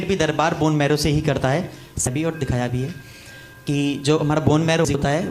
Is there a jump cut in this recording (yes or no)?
yes